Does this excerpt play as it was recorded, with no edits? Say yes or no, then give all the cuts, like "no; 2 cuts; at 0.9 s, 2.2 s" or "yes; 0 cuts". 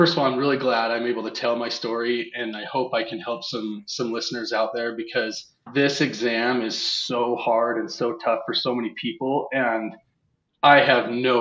yes; 0 cuts